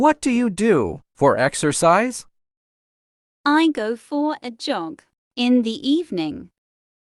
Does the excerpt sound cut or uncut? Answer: uncut